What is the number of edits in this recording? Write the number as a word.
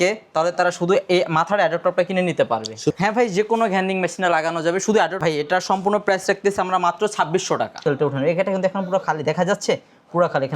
three